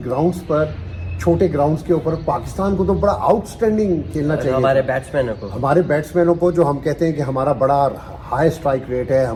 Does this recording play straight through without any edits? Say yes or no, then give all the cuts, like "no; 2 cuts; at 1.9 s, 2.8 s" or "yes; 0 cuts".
yes; 0 cuts